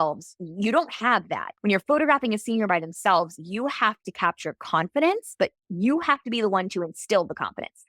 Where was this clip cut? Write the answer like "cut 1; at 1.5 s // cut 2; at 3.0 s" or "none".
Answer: cut 1; at 1.4 s